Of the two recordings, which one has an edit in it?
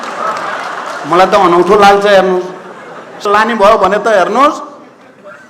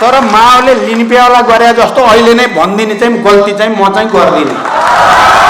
first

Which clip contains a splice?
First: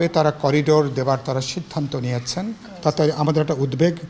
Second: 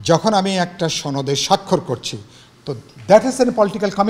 first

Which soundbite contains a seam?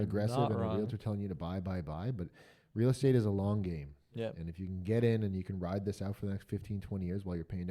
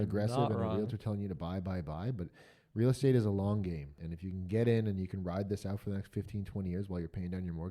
second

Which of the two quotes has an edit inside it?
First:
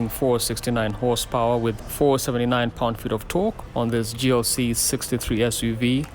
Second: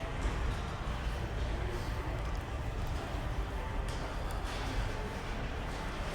first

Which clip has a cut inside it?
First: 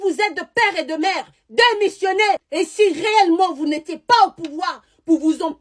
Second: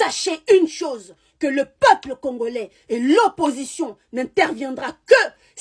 first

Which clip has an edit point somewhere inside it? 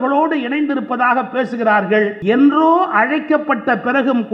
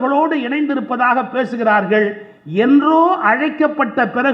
first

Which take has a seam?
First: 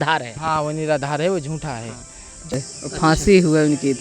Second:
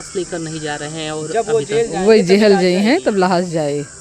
first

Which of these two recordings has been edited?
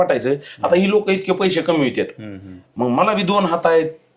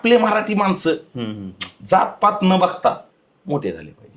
second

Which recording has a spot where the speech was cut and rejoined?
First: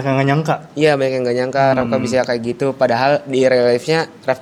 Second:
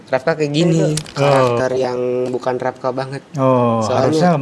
second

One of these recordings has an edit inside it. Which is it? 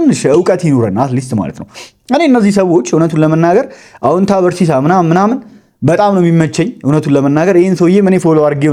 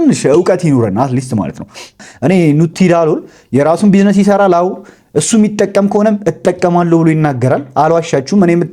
second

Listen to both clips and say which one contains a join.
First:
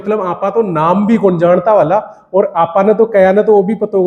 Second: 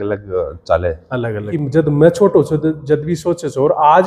second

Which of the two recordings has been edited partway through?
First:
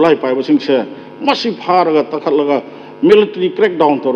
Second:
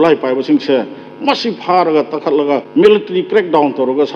second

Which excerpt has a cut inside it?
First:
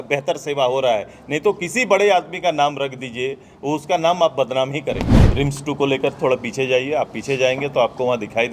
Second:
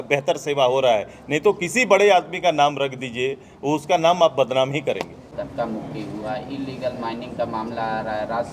first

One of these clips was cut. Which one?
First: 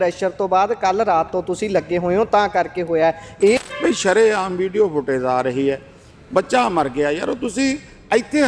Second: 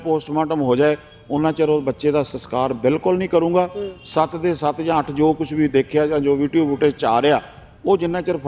first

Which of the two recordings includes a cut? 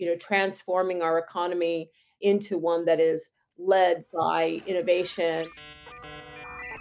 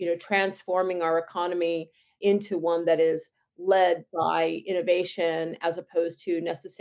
first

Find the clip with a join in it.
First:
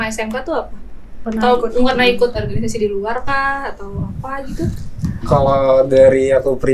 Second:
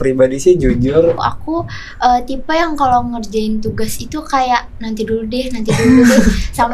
second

